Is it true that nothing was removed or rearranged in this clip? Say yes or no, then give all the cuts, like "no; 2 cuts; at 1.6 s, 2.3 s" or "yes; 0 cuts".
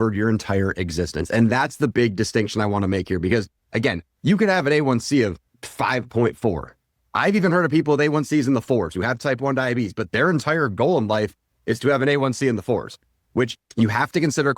no; 1 cut; at 13.5 s